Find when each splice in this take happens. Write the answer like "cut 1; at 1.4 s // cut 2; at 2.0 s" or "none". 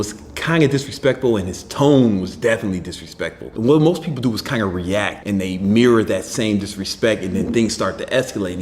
cut 1; at 1.6 s